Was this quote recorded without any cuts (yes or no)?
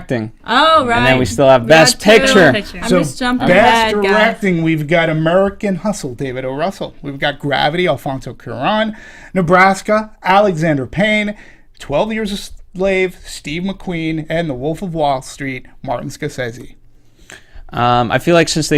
no